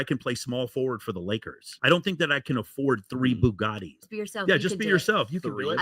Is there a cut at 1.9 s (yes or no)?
no